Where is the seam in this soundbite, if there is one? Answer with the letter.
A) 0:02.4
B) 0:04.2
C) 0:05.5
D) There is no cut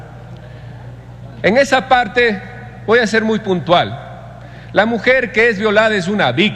D